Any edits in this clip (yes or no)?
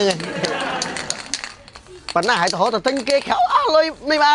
no